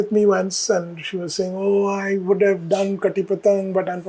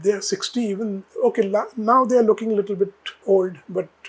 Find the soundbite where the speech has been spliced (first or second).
second